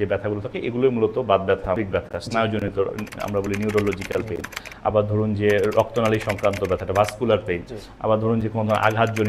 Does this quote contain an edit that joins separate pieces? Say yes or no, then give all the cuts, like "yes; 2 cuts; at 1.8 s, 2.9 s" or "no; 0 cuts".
yes; 1 cut; at 1.8 s